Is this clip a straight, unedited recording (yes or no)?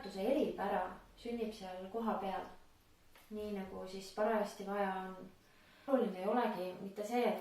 no